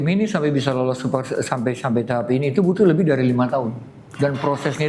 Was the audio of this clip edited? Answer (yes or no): no